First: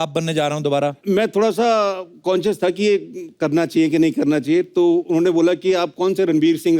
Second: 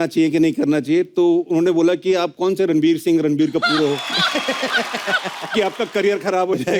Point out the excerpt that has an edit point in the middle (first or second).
first